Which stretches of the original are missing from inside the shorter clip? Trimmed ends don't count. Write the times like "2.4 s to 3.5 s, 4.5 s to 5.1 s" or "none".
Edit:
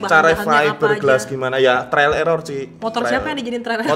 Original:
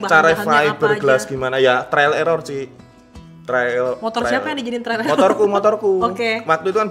2.8 s to 4.0 s